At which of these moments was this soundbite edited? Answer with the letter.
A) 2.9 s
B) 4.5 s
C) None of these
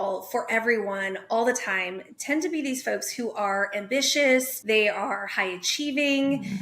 B